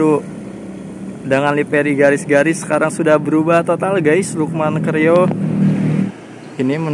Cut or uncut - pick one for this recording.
cut